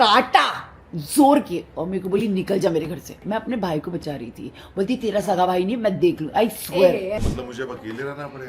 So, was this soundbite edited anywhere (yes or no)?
yes